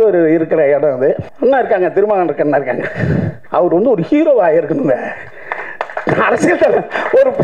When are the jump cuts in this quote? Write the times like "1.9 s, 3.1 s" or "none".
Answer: 1.3 s, 3.4 s